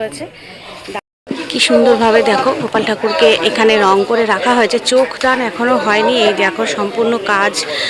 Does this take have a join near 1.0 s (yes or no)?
yes